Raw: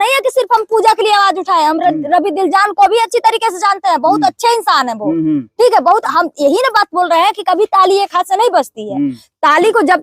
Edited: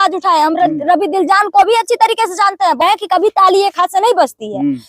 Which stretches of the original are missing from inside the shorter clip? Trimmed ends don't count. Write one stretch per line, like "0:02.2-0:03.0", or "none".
0:04.1-0:07.2